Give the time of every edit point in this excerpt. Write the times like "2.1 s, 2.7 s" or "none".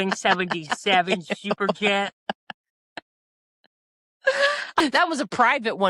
4.8 s